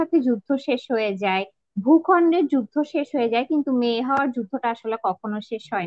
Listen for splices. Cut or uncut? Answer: uncut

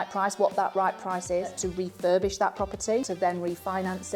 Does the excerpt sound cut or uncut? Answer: cut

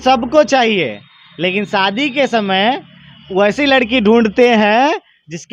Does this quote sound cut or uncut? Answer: uncut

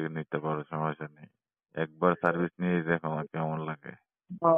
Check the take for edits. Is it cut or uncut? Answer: uncut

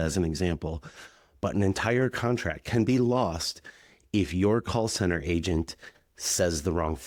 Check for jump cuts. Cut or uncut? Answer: uncut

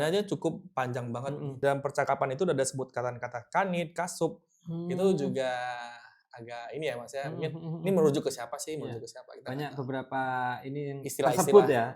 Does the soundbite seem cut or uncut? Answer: cut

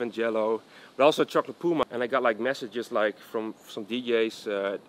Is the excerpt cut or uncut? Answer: cut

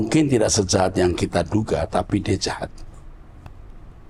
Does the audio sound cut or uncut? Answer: uncut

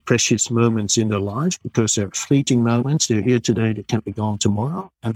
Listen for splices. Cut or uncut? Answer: uncut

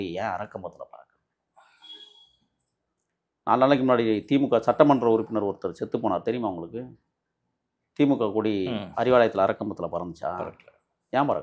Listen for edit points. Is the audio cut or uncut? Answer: uncut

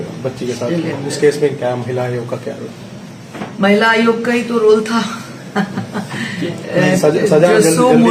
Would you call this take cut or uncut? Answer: uncut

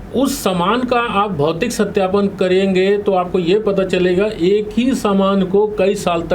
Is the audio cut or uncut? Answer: uncut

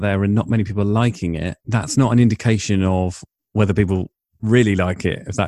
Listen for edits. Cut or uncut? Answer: cut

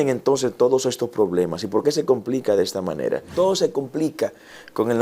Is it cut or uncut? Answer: cut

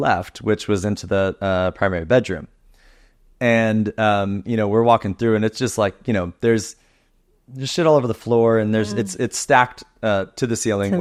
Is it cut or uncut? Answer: uncut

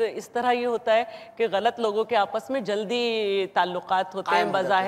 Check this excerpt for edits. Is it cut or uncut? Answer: uncut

